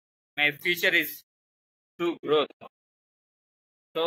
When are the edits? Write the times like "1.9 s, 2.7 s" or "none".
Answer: none